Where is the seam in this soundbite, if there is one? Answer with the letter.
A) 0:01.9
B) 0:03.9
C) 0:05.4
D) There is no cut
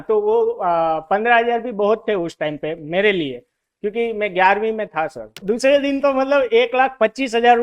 C